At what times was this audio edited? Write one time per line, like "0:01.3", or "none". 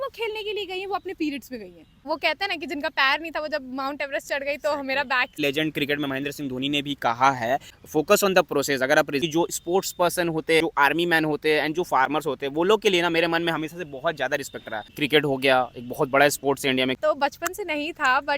0:02.1
0:05.4
0:07.8
0:09.2
0:10.6
0:14.9
0:17.0